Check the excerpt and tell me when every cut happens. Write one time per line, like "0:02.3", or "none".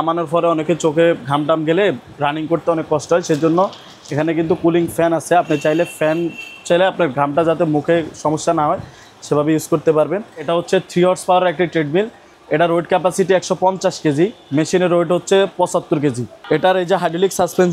0:10.5
0:16.3